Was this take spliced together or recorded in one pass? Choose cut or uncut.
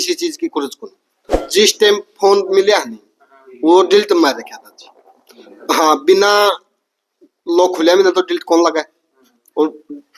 cut